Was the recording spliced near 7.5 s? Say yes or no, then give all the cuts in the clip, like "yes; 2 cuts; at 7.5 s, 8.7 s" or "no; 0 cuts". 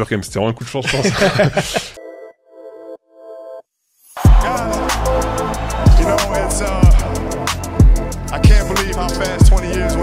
no; 1 cut; at 1.9 s